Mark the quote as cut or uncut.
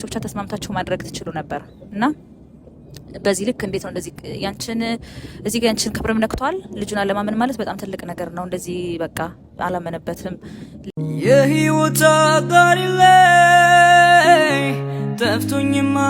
cut